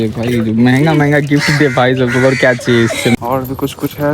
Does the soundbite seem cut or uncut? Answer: cut